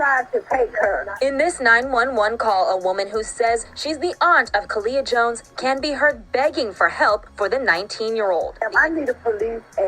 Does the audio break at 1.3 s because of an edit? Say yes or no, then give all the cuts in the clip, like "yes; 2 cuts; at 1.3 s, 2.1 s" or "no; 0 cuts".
no; 1 cut; at 8.6 s